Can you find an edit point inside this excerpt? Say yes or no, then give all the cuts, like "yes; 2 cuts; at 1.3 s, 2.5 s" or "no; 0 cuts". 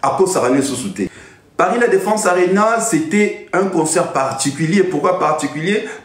yes; 1 cut; at 1.1 s